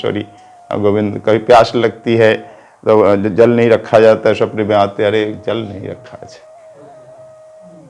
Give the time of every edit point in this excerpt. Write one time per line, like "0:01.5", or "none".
none